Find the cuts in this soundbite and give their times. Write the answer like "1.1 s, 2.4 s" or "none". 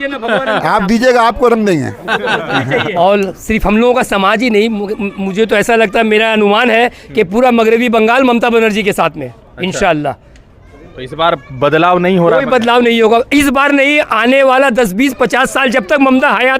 2.9 s